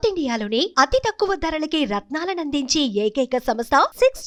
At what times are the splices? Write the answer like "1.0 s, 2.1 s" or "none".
none